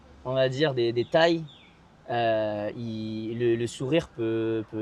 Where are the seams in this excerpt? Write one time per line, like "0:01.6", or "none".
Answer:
none